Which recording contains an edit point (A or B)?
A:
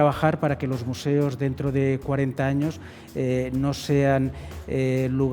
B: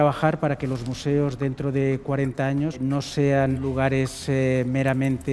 B